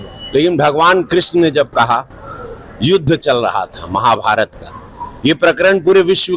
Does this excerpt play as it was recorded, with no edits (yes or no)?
yes